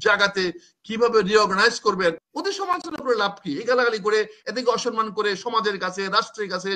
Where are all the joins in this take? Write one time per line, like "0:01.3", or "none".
0:02.3